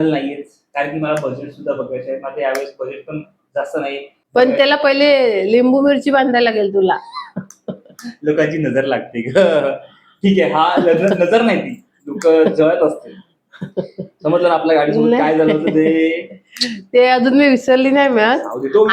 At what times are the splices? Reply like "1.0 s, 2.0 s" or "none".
4.1 s